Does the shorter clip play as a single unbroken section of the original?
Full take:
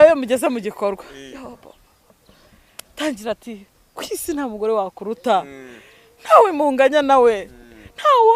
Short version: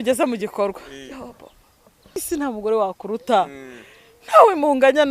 no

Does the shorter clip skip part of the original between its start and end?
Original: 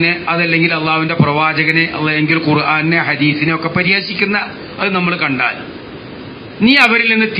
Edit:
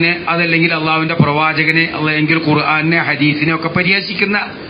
no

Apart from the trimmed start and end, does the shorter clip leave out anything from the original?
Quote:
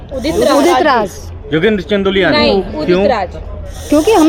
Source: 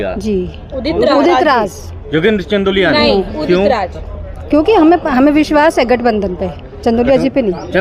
no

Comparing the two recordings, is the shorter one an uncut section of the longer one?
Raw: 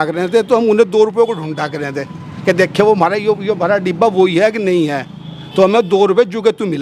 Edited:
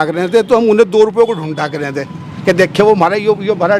yes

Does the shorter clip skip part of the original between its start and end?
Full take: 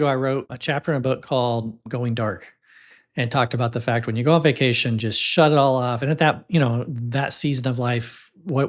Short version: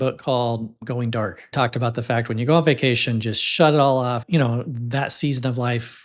yes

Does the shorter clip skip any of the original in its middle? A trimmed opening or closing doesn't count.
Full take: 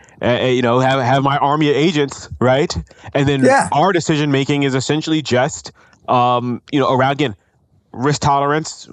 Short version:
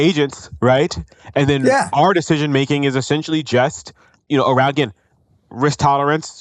yes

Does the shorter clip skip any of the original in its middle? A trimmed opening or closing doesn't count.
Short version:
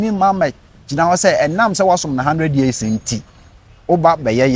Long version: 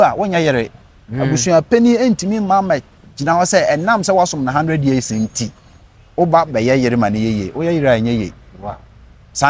no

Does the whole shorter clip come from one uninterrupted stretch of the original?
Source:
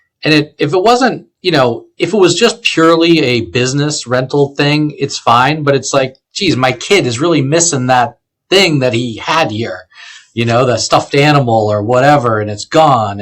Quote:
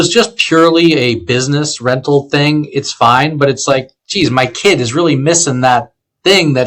yes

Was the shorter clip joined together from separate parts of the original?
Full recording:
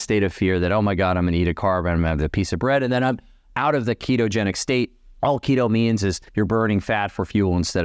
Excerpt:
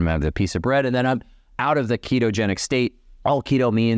no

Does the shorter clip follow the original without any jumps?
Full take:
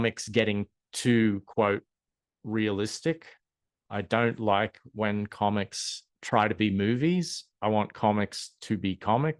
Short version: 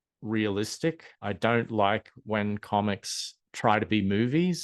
no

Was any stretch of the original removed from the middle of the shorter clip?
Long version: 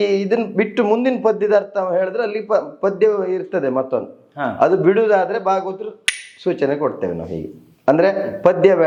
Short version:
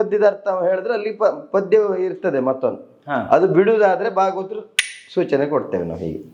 no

